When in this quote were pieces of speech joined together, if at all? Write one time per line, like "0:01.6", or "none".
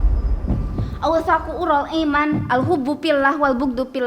0:01.0